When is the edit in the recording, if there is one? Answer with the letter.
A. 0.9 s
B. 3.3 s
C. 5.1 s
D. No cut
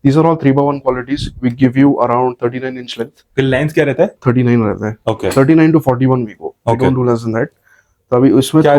D